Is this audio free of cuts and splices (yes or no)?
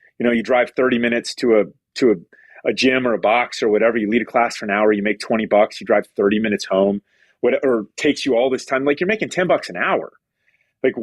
yes